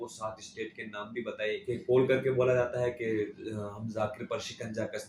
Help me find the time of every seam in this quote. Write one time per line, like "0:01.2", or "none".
0:01.6

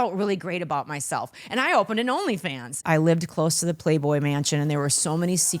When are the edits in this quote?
0:02.8

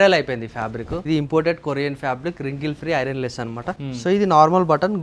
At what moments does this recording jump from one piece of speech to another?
0:01.0
0:03.8

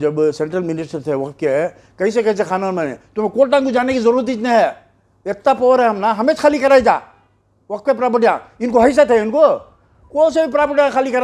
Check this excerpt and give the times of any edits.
none

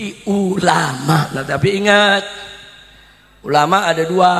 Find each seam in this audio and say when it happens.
0:01.3

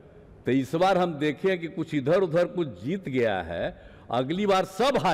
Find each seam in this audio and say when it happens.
none

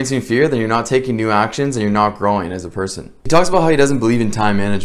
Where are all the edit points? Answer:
none

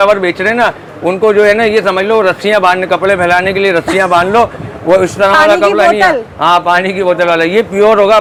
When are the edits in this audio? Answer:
none

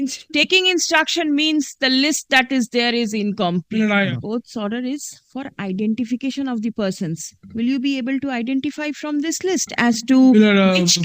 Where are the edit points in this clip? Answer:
0:04.1

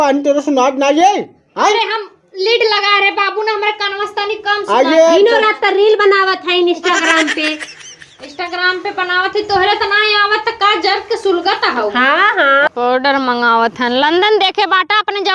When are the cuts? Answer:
0:12.7

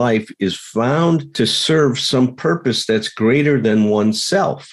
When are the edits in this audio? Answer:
0:01.3

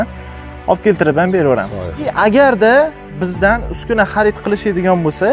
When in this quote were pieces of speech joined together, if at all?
0:02.1

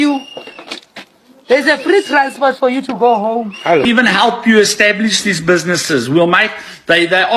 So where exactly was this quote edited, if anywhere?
0:03.8

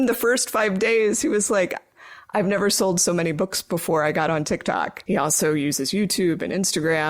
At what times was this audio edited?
0:05.0

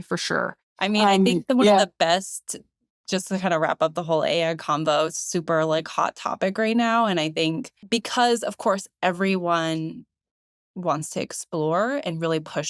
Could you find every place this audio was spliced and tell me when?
none

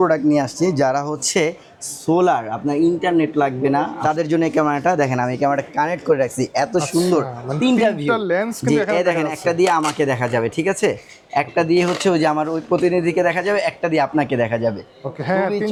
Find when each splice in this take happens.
none

